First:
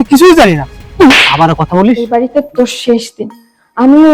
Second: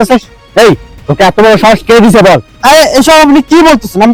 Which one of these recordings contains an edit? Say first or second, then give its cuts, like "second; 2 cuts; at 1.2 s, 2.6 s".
first; 1 cut; at 2.0 s